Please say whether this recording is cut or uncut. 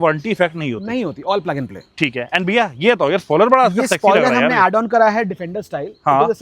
uncut